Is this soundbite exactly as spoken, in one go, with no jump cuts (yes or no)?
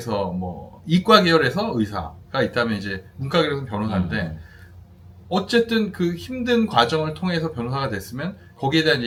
yes